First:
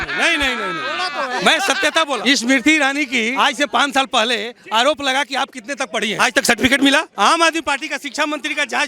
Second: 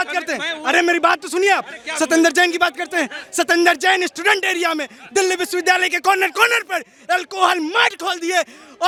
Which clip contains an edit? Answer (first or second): first